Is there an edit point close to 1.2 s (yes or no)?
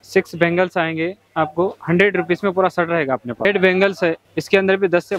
no